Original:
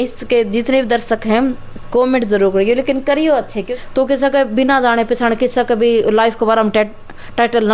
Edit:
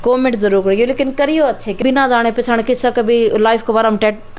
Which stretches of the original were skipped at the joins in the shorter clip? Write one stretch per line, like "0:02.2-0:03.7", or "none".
0:03.7-0:04.5